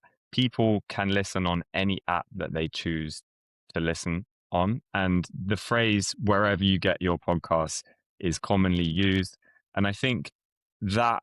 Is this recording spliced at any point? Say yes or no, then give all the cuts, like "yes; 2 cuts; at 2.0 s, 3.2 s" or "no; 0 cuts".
no; 0 cuts